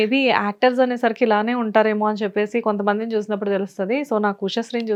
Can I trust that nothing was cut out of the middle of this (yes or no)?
yes